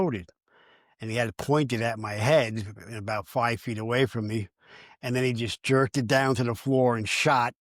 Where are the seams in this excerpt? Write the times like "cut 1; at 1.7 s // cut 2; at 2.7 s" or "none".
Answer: none